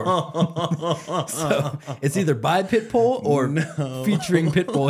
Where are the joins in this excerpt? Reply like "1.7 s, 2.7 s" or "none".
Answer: none